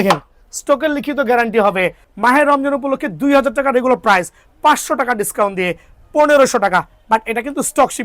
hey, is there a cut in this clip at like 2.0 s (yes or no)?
yes